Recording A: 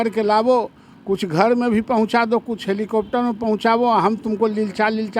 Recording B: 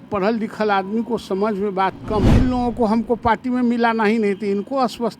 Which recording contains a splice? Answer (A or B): B